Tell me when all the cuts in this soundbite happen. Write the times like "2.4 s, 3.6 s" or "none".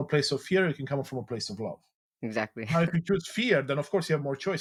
none

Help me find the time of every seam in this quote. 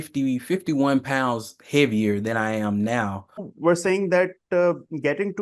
3.5 s

